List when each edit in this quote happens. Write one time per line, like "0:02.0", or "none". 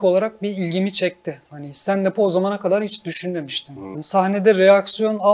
0:03.9

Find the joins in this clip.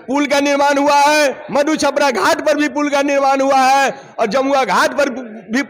none

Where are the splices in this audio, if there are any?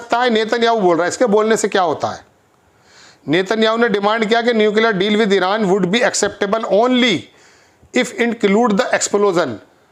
none

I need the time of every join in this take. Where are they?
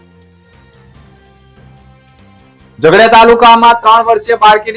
0:02.4

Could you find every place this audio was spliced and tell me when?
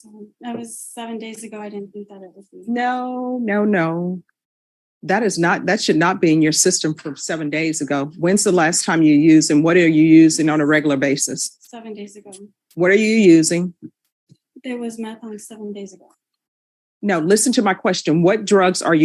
none

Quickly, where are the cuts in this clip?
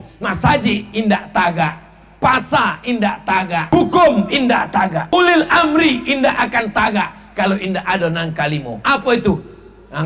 0:03.7
0:05.1

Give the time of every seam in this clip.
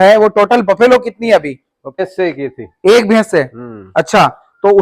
0:01.9

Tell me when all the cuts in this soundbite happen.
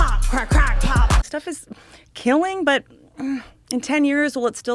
0:01.2

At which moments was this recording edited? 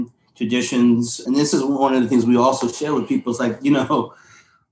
none

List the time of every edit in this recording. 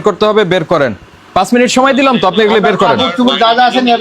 0:01.3

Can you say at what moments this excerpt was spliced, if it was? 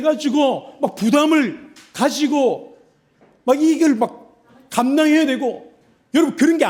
none

